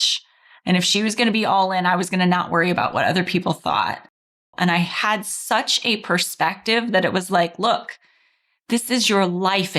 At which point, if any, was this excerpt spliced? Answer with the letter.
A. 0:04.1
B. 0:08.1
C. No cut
A